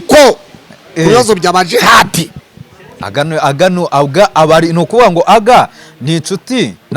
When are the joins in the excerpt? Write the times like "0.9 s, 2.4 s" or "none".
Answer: none